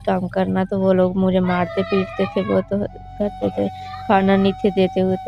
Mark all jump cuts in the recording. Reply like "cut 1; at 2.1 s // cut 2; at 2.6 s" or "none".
none